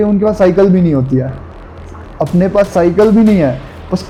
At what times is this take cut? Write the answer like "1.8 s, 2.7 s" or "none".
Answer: none